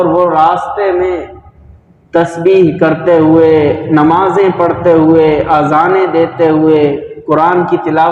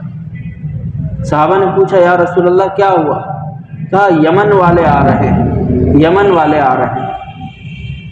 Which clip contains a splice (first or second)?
second